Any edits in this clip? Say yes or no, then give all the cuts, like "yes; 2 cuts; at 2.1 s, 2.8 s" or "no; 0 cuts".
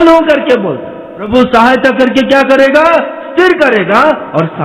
yes; 1 cut; at 1.2 s